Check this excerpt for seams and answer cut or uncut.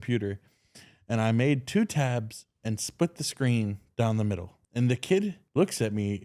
cut